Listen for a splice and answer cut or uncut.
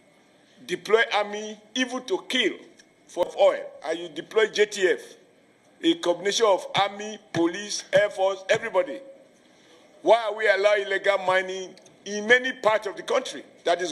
cut